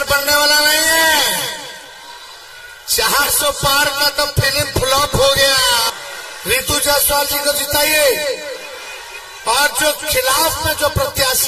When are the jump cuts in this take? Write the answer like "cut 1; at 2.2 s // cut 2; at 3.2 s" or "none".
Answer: cut 1; at 5.9 s